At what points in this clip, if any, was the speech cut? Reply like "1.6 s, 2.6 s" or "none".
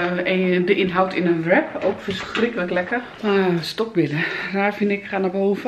3.1 s